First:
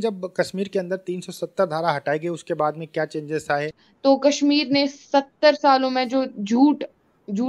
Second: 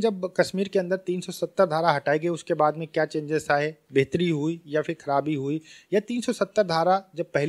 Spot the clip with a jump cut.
first; 1 cut; at 3.8 s

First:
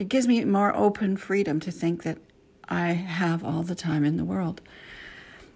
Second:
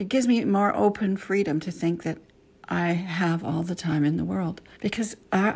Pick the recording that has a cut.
second; 1 cut; at 4.7 s

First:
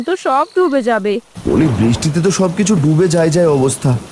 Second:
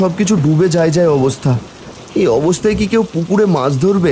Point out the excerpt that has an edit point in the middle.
first; 1 cut; at 1.3 s

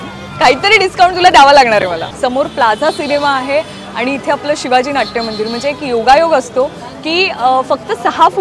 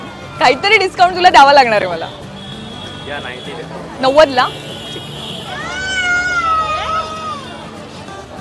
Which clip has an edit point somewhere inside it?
first; 1 cut; at 2.1 s

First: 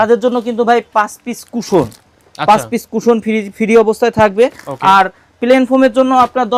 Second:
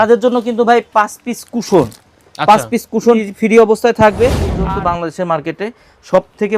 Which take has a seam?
second; 2 cuts; at 3.2 s, 4.5 s

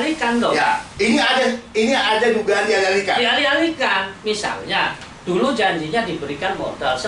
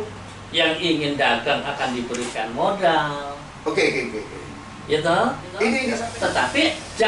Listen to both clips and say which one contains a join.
second; 1 cut; at 5.9 s

